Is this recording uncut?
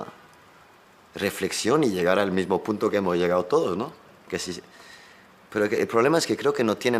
yes; 0 cuts

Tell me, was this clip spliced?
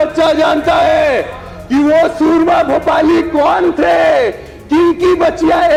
no; 0 cuts

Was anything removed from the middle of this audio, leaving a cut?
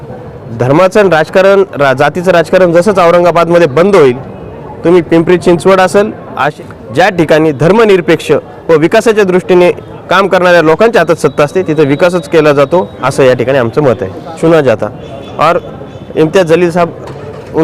yes; 2 cuts; at 6.5 s, 14.4 s

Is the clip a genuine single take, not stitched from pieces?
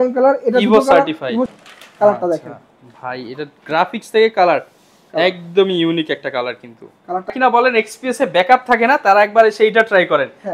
no; 2 cuts; at 1.5 s, 7.3 s

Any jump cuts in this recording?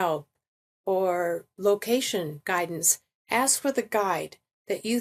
no; 0 cuts

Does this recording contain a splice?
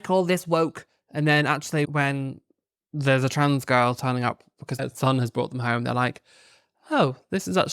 yes; 2 cuts; at 1.9 s, 4.8 s

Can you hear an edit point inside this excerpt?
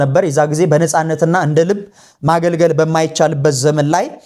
no; 0 cuts

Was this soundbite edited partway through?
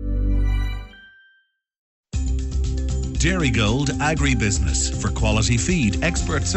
yes; 1 cut; at 2.0 s

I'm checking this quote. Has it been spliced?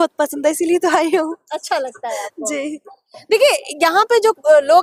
no; 0 cuts

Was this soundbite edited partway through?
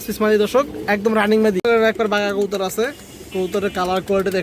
yes; 1 cut; at 1.6 s

